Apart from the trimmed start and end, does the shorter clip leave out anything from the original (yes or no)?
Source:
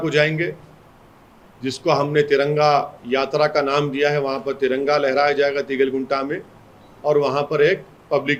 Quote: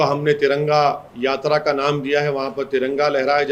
no